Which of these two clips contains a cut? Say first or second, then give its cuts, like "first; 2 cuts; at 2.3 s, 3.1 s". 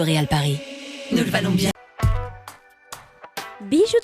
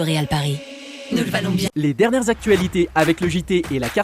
second; 1 cut; at 1.7 s